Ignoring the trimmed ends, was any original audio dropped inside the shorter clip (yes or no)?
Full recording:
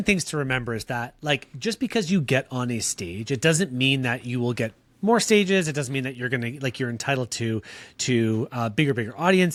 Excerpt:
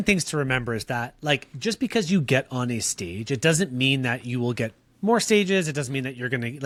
no